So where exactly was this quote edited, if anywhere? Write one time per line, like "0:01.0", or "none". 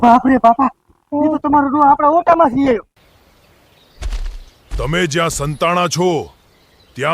0:02.9